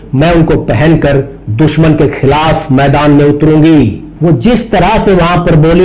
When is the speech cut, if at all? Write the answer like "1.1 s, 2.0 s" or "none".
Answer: none